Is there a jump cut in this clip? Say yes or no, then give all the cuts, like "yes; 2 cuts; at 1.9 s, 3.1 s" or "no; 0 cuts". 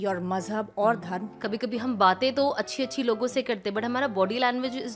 yes; 1 cut; at 1.3 s